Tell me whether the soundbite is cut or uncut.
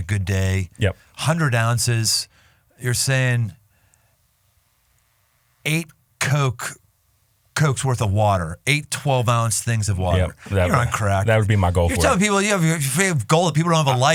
uncut